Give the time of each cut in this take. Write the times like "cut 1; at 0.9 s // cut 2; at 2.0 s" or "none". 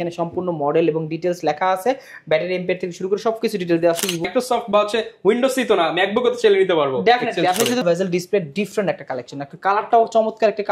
cut 1; at 4.3 s // cut 2; at 7.8 s